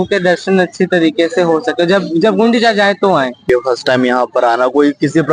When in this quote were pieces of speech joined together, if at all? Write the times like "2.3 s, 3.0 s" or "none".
3.5 s